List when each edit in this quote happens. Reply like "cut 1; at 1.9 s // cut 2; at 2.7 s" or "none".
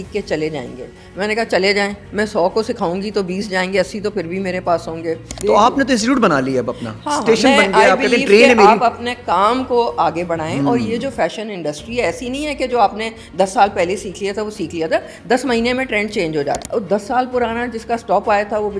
cut 1; at 5.3 s // cut 2; at 16.6 s